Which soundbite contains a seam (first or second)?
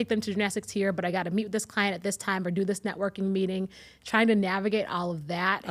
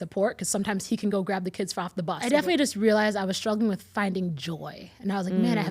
second